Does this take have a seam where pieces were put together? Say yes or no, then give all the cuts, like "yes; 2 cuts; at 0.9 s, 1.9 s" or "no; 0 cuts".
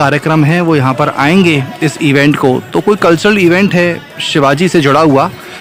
no; 0 cuts